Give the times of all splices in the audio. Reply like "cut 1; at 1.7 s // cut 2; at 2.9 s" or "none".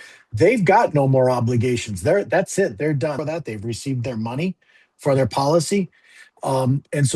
cut 1; at 3.2 s